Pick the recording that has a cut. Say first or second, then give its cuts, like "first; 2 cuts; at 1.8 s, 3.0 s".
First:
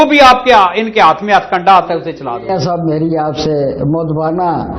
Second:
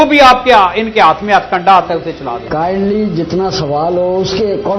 second; 1 cut; at 2.5 s